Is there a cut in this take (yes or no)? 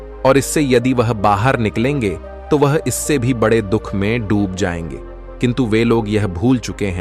no